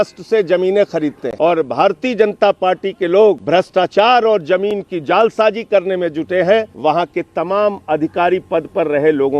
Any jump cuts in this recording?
yes; 3 cuts; at 1.2 s, 3.4 s, 6.7 s

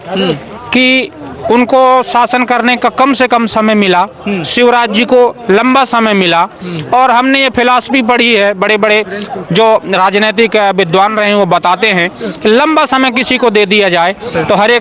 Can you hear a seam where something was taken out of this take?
no; 0 cuts

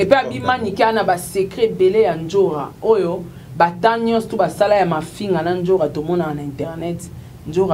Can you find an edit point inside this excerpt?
no; 0 cuts

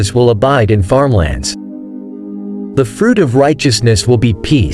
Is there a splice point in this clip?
yes; 2 cuts; at 1.3 s, 2.8 s

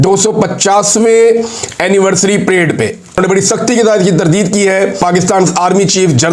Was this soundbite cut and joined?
yes; 2 cuts; at 3.2 s, 5.0 s

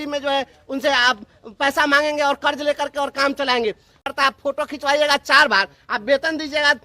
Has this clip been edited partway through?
yes; 1 cut; at 4.1 s

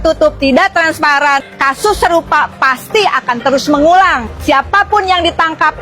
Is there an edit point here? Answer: yes; 2 cuts; at 1.5 s, 4.3 s

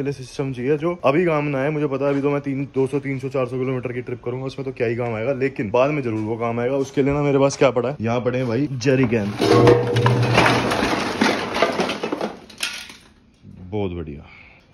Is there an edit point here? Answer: no; 0 cuts

